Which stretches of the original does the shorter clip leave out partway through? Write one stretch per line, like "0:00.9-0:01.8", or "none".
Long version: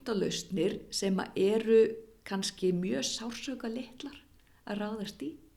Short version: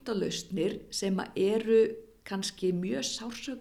none